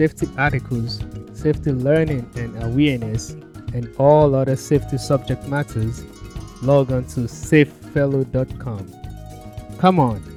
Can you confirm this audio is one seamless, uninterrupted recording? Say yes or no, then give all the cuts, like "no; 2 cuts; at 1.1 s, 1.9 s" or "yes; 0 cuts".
yes; 0 cuts